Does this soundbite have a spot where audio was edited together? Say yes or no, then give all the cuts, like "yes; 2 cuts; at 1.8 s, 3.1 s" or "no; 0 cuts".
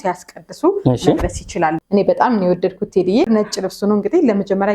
yes; 2 cuts; at 1.8 s, 3.2 s